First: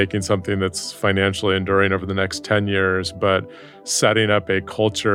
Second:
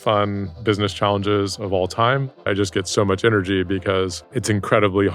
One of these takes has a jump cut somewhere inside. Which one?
second; 2 cuts; at 2.5 s, 4.3 s

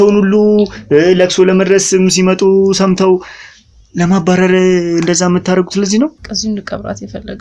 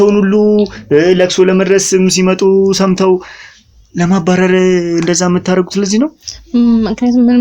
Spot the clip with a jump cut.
first; 1 cut; at 6.3 s

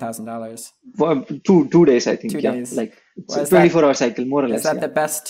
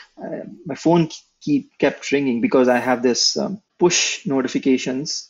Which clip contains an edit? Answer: second; 1 cut; at 3.6 s

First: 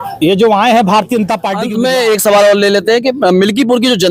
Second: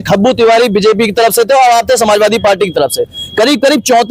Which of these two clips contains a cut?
first; 1 cut; at 1.6 s

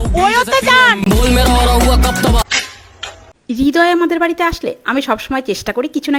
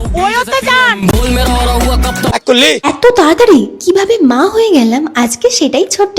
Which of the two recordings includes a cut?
second; 1 cut; at 2.3 s

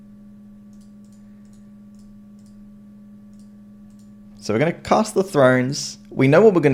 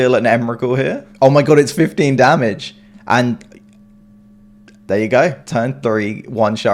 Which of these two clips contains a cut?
second; 2 cuts; at 1.0 s, 5.4 s

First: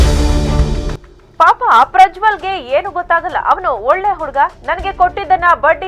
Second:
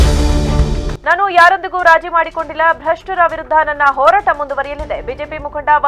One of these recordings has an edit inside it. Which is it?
first; 1 cut; at 0.9 s

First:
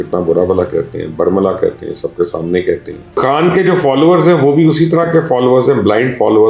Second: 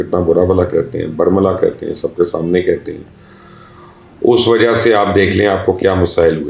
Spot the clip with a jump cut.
first; 1 cut; at 3.1 s

